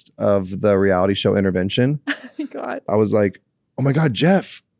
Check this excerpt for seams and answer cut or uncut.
cut